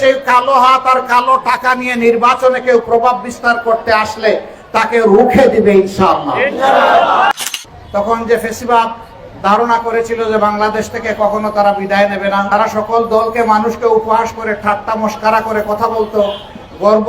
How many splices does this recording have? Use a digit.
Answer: 1